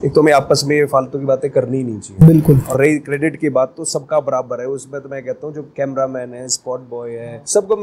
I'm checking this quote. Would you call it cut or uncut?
uncut